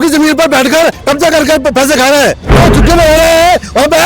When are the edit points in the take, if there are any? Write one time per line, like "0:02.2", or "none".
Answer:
0:02.5

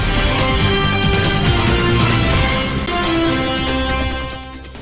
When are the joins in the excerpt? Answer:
0:02.8

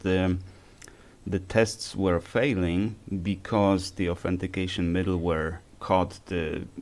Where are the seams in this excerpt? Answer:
0:05.7

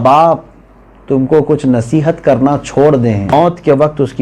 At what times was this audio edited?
0:03.3

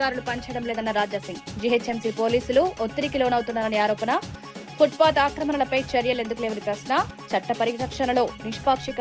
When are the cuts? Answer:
none

